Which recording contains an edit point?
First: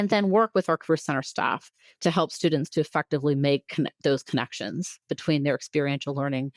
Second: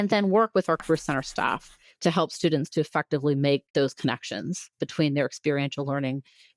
second; 1 cut; at 3.7 s

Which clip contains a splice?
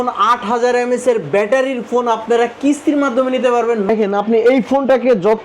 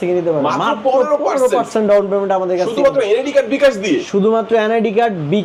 first; 1 cut; at 3.9 s

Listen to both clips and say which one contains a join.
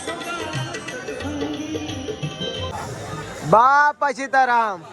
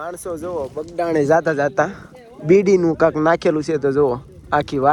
first; 1 cut; at 2.7 s

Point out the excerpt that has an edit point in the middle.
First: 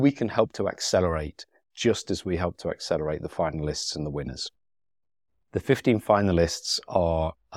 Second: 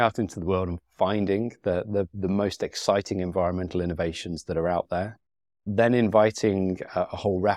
first; 1 cut; at 5.3 s

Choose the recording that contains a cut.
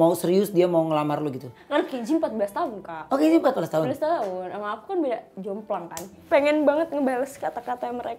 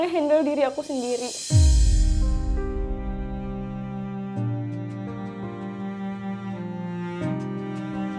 first; 2 cuts; at 1.6 s, 6.2 s

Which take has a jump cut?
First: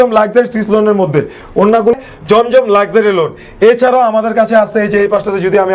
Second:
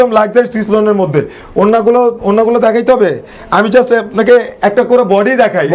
first; 1 cut; at 1.9 s

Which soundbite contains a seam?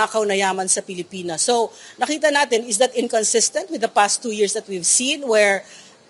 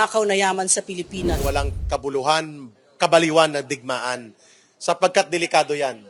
second; 1 cut; at 1.4 s

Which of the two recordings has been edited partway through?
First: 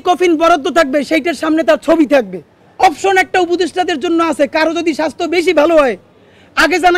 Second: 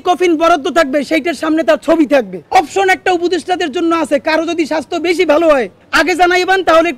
second; 2 cuts; at 2.4 s, 5.8 s

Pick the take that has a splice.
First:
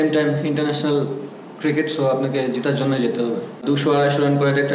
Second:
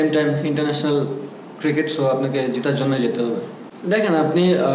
first; 1 cut; at 3.6 s

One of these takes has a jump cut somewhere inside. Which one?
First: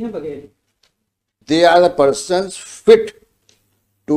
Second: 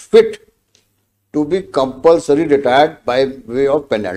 first; 1 cut; at 1.4 s

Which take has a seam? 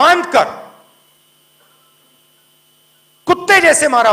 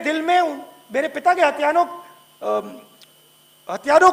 first; 1 cut; at 1.1 s

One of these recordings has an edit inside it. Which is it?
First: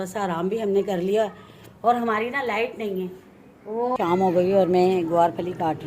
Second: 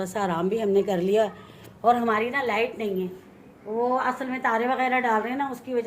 first; 1 cut; at 4.0 s

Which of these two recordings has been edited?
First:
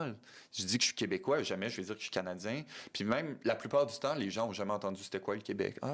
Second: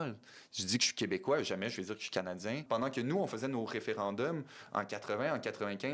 second; 1 cut; at 2.6 s

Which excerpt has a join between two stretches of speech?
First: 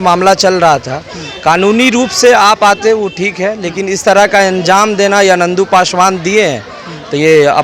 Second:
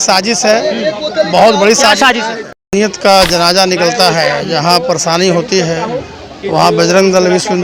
second; 1 cut; at 2.5 s

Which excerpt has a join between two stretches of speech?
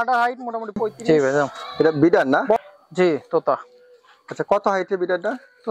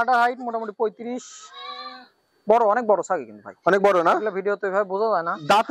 first; 1 cut; at 1.0 s

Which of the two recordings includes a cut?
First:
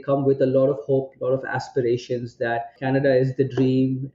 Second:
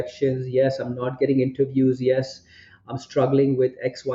first; 1 cut; at 2.7 s

